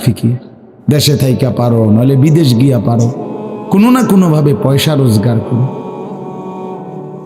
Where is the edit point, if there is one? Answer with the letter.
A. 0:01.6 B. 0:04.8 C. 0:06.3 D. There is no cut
C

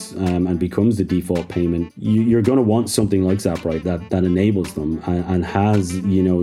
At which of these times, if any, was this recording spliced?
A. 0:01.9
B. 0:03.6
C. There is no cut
A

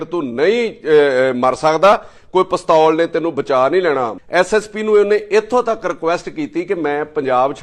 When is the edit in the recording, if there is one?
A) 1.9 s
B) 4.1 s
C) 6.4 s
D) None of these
B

